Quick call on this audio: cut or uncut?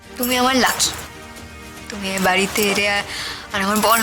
uncut